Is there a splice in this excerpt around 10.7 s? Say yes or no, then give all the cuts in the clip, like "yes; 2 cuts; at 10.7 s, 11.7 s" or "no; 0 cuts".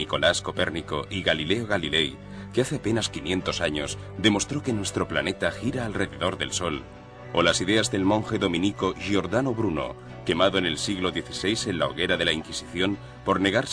yes; 1 cut; at 10.7 s